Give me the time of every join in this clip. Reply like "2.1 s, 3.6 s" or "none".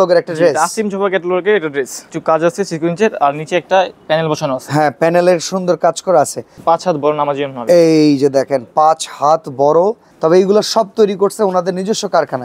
2.0 s, 6.5 s, 10.1 s